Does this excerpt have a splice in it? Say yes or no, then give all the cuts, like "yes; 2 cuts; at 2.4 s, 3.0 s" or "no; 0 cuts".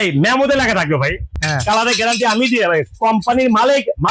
yes; 1 cut; at 1.4 s